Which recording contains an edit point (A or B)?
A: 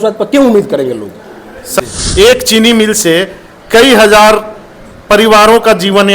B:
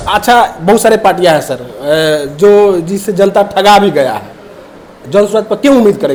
A